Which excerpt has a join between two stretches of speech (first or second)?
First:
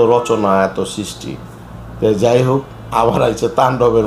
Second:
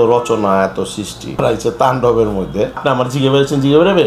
second